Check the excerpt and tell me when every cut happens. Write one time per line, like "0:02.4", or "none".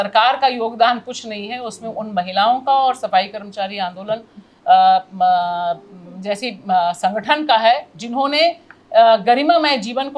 none